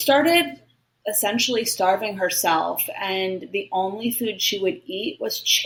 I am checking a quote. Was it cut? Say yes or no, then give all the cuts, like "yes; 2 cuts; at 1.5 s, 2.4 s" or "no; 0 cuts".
no; 0 cuts